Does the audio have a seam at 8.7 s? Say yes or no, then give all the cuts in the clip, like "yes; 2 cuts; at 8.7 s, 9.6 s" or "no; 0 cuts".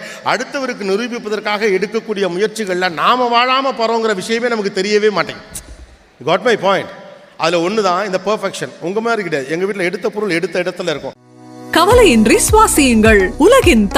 no; 1 cut; at 11.2 s